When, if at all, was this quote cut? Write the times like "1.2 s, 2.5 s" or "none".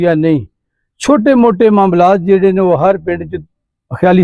none